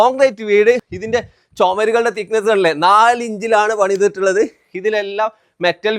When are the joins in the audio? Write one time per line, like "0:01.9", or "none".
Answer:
0:00.9